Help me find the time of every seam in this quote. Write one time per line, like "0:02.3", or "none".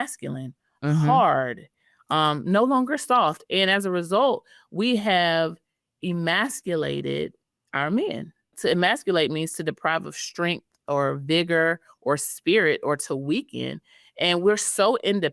0:08.5